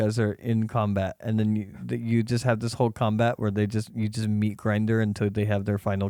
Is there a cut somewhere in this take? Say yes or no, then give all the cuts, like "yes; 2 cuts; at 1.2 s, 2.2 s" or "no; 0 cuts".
no; 0 cuts